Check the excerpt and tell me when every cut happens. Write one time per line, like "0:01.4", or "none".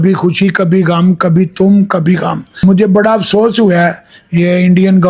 0:02.6